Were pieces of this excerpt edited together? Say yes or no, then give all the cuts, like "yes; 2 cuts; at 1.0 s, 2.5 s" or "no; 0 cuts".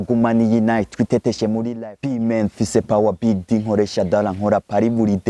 yes; 1 cut; at 1.7 s